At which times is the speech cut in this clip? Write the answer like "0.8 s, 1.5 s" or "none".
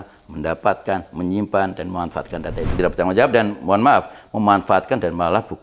2.7 s

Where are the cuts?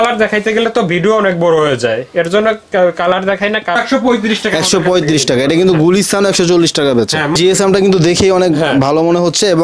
3.8 s, 7.4 s

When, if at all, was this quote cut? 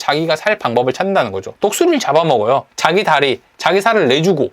1.4 s, 2.7 s

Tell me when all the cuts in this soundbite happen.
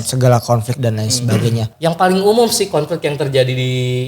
1.7 s

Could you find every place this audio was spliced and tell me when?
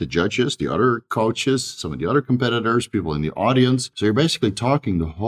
3.9 s

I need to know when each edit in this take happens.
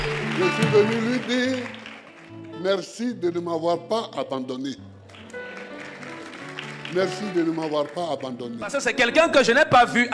8.8 s

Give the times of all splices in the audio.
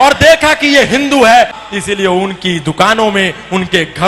1.6 s

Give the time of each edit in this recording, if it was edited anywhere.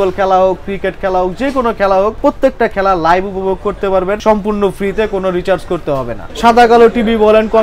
2.2 s, 4.2 s, 6.2 s

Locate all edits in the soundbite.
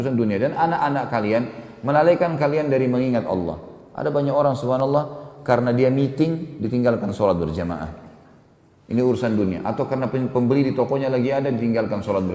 none

